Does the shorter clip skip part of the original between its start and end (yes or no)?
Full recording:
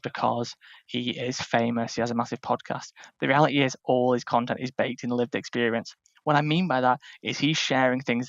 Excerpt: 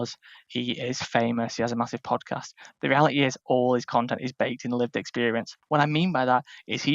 yes